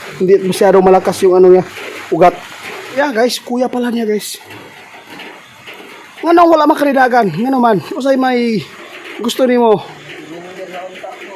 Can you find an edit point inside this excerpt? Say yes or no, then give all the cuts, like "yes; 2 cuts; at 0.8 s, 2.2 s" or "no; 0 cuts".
yes; 1 cut; at 3.0 s